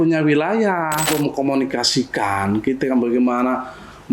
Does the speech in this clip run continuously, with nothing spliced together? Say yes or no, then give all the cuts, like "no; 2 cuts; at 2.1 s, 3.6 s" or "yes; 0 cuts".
no; 1 cut; at 1.1 s